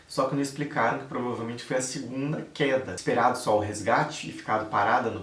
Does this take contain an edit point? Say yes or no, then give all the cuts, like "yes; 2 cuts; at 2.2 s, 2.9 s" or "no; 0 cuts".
yes; 1 cut; at 2.9 s